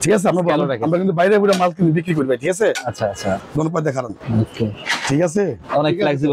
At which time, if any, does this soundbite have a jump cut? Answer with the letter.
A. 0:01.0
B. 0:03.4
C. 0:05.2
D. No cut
B